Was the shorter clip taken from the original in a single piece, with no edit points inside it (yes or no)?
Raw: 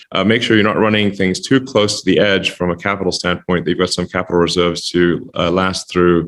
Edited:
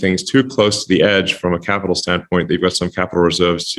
yes